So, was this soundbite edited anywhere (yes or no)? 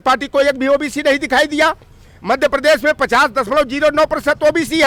no